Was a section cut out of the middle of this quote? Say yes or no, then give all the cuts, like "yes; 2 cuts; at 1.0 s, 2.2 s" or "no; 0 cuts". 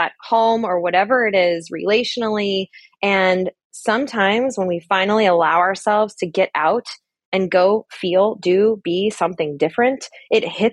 no; 0 cuts